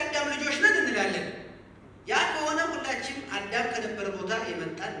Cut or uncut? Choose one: uncut